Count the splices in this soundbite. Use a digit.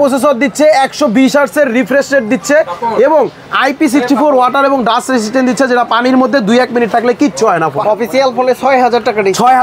1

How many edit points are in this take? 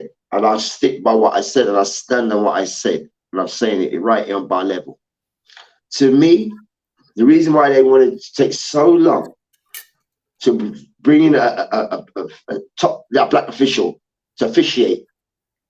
0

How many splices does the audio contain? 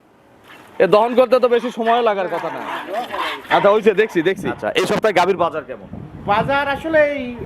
1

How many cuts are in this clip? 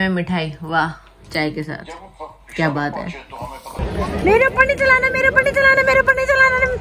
1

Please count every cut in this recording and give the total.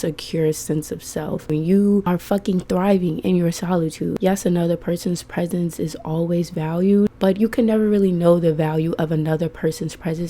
4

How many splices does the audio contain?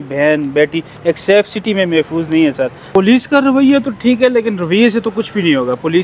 1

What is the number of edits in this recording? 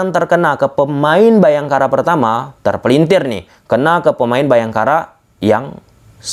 0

